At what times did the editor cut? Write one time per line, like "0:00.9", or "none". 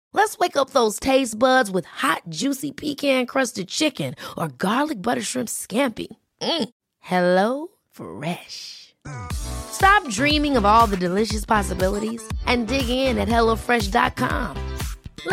none